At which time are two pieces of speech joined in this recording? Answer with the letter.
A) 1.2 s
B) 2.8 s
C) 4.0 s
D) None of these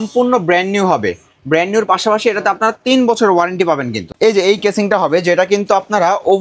C